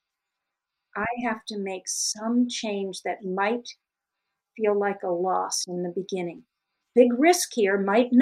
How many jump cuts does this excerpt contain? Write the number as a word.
one